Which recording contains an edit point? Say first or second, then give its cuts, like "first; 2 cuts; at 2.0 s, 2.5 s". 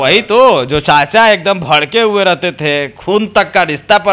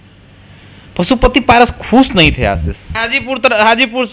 second; 1 cut; at 3.0 s